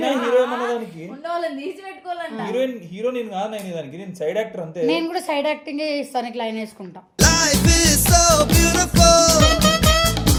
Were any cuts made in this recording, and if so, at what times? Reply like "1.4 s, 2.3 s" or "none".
none